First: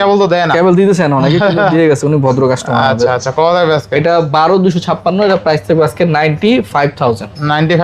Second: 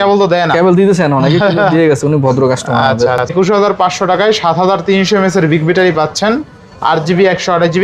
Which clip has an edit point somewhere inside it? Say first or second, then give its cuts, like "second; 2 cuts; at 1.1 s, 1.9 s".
second; 1 cut; at 3.3 s